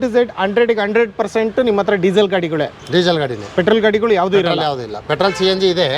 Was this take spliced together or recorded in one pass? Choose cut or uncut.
uncut